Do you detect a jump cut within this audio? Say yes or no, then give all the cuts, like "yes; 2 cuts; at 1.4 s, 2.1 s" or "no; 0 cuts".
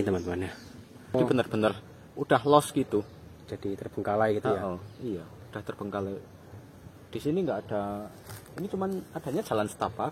yes; 1 cut; at 1.1 s